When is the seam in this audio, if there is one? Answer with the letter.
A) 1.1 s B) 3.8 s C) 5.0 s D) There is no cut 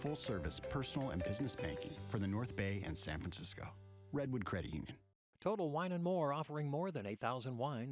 C